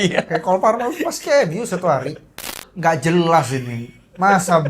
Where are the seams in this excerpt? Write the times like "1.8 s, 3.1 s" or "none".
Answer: 2.6 s